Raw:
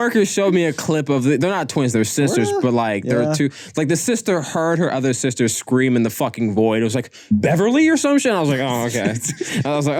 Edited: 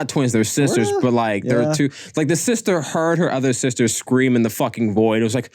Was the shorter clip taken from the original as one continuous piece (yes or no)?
yes